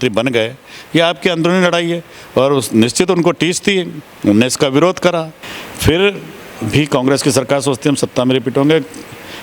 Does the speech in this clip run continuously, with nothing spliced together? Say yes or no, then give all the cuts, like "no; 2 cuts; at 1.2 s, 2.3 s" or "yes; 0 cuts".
no; 1 cut; at 5.4 s